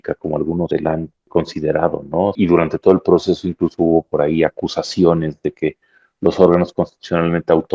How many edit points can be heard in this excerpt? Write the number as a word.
two